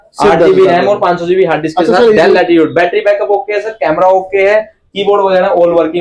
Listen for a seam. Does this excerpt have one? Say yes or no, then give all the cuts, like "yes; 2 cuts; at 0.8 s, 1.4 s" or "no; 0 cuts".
no; 0 cuts